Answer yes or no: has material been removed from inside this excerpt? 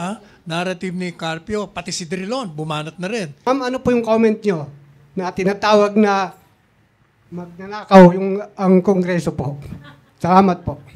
yes